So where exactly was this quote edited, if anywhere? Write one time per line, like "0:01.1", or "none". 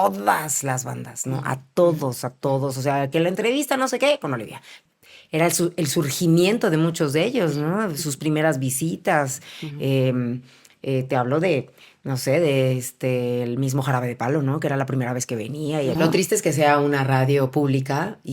0:04.7
0:15.9